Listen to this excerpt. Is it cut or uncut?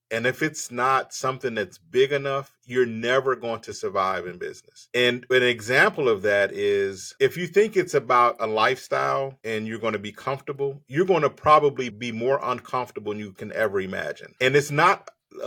uncut